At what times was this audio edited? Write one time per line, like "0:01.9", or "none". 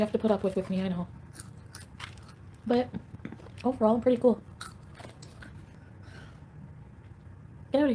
0:05.5